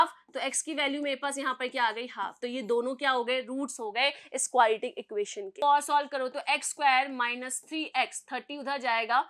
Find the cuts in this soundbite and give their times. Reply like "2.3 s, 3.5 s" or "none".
5.5 s